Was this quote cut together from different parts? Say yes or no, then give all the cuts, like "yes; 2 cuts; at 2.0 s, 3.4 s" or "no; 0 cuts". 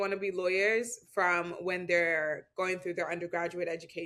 no; 0 cuts